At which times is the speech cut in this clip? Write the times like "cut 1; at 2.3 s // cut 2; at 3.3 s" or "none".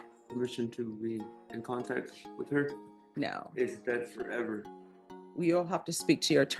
none